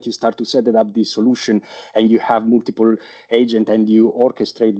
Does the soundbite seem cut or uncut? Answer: uncut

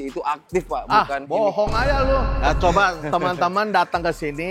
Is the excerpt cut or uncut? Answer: cut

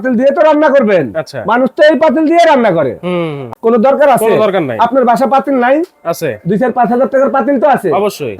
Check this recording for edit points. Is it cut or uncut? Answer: cut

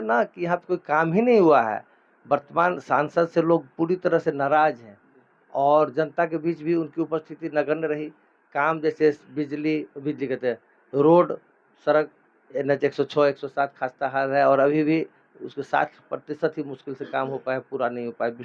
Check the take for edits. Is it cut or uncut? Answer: uncut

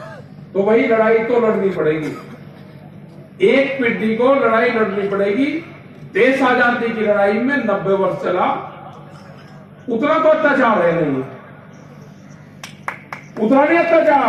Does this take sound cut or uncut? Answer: uncut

